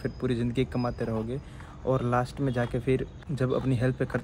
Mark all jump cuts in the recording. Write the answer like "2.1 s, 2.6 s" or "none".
3.2 s